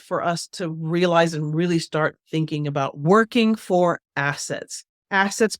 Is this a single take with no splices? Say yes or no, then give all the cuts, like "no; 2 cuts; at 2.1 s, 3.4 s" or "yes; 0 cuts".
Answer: no; 1 cut; at 2.5 s